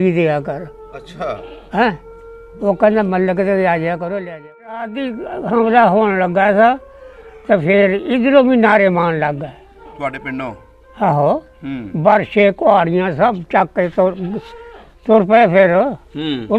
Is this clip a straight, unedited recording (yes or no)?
no